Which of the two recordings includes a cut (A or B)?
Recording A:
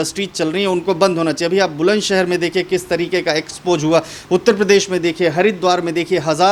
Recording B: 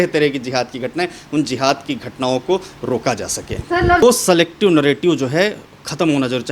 B